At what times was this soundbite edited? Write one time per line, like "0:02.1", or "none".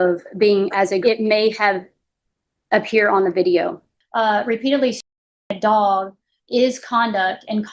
0:01.0
0:03.9